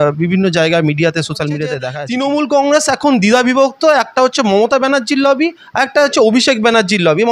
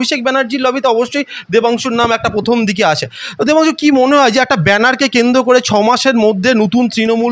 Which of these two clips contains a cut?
first; 1 cut; at 1.9 s

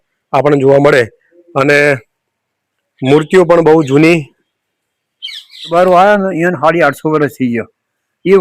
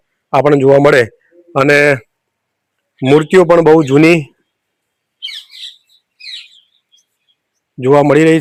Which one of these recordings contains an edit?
first; 1 cut; at 5.7 s

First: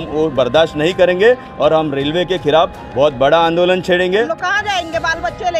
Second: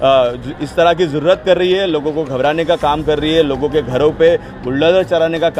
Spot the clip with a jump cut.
first; 1 cut; at 4.3 s

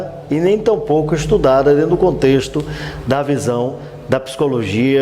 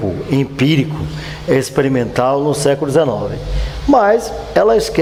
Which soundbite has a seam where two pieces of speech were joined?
first; 1 cut; at 1.2 s

